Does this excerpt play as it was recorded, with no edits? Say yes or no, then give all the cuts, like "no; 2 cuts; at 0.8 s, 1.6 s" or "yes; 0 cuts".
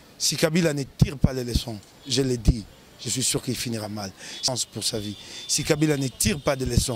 no; 1 cut; at 4.5 s